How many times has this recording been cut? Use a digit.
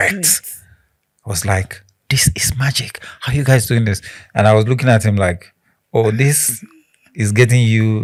0